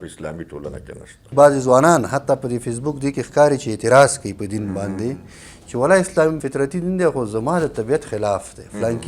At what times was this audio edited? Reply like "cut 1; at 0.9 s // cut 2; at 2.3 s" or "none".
cut 1; at 1.3 s // cut 2; at 6.4 s